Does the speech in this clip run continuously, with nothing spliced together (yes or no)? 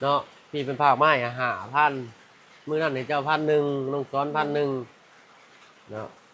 yes